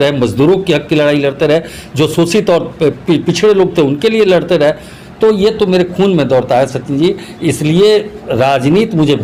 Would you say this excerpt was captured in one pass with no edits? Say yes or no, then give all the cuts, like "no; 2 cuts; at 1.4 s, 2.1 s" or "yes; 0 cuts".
yes; 0 cuts